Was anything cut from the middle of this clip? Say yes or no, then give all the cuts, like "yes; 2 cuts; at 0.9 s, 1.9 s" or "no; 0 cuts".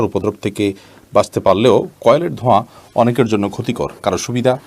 no; 0 cuts